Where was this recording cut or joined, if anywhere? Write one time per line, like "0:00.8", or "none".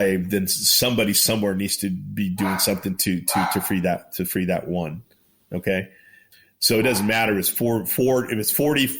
none